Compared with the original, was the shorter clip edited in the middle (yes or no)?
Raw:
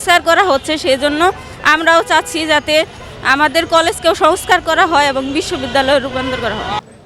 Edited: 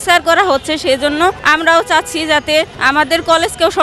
yes